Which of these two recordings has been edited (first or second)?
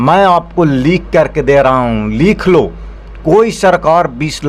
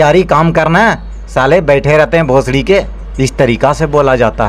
second